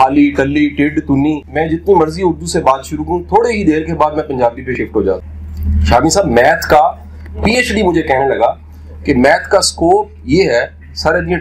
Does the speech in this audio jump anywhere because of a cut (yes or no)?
yes